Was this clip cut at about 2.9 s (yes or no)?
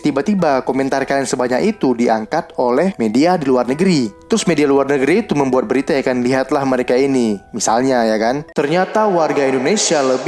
yes